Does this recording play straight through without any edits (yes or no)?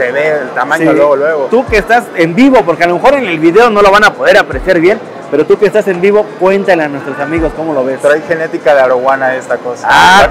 yes